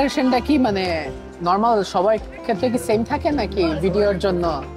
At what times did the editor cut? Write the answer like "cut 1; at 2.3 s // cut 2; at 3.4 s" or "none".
none